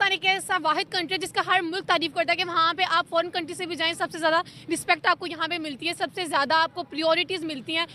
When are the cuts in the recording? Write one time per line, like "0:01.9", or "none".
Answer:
none

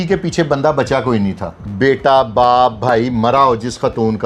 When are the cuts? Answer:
0:01.6

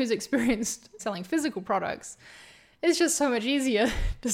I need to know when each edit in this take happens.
0:01.0

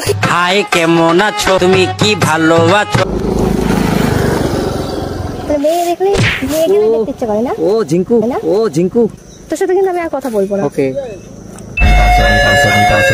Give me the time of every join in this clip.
0:03.1
0:09.3

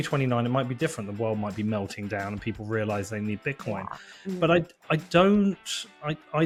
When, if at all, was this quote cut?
none

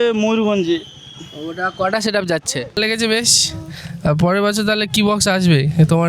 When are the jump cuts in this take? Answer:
0:02.8

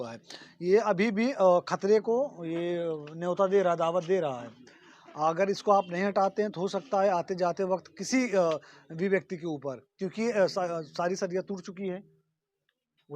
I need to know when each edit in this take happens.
none

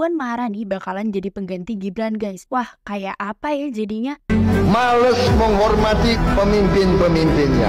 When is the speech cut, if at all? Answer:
0:04.6

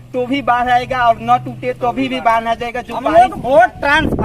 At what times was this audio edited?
0:02.9

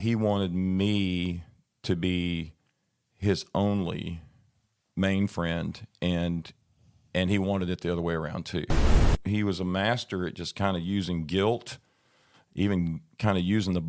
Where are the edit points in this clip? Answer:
0:09.0

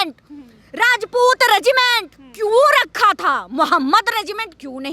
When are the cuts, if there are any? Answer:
none

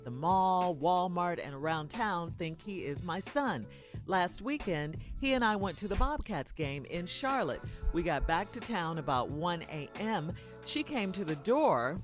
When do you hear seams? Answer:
0:05.5

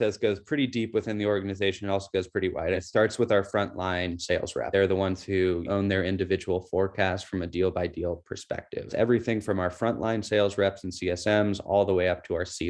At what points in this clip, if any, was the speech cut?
0:02.8
0:04.7
0:05.7
0:08.9

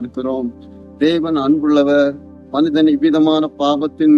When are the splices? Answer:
0:01.2

